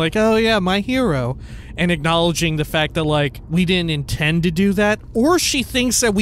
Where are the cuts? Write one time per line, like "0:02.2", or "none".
0:03.4
0:05.0